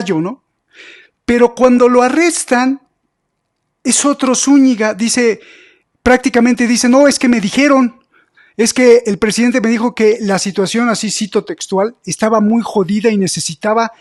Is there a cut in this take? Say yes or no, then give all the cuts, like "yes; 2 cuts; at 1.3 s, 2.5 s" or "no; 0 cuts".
no; 0 cuts